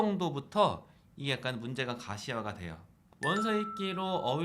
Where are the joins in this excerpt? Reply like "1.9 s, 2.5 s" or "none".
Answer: 3.0 s